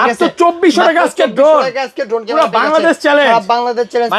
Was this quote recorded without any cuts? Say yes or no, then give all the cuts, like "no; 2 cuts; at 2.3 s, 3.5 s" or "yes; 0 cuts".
yes; 0 cuts